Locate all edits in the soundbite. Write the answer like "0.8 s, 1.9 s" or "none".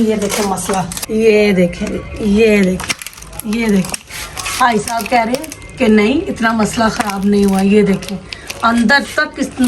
1.0 s